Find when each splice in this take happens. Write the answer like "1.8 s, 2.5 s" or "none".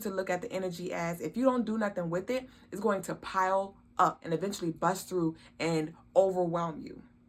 4.2 s